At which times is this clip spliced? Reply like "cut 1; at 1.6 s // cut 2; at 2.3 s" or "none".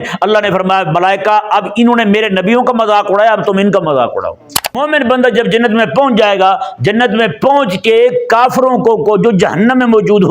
cut 1; at 4.8 s